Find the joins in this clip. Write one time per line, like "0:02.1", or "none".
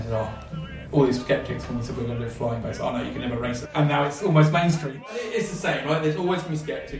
0:03.6
0:04.9